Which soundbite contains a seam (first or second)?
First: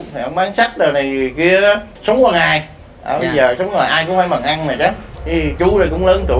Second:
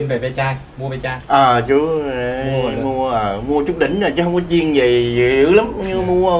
first